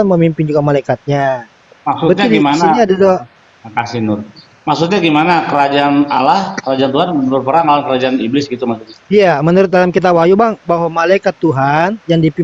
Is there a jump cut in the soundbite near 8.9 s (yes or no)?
yes